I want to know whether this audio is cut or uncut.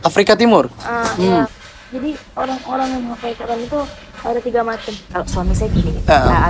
cut